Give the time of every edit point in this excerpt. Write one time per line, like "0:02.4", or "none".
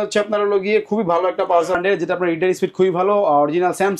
0:01.8